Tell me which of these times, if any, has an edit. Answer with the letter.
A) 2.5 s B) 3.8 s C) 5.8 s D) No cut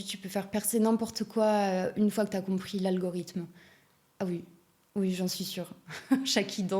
D